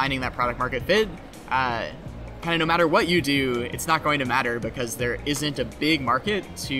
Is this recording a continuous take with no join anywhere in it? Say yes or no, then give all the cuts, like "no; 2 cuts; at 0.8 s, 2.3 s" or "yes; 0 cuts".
yes; 0 cuts